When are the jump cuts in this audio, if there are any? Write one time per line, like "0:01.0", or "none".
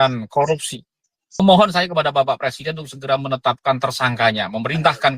0:01.4